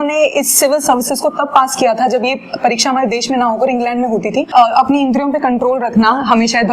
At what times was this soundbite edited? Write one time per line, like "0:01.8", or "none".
0:04.5